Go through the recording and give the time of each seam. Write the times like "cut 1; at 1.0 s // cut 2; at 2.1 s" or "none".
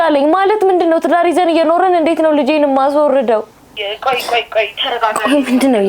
cut 1; at 3.8 s